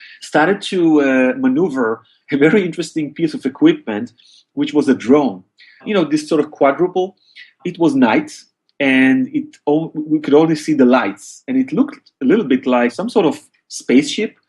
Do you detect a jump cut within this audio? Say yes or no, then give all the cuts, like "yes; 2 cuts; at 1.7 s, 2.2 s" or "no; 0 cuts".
yes; 2 cuts; at 5.8 s, 13.0 s